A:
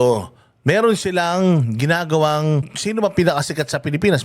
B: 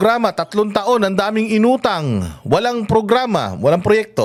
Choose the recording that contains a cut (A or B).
A